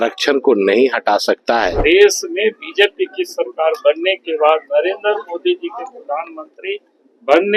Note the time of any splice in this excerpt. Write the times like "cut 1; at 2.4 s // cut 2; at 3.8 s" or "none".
cut 1; at 1.7 s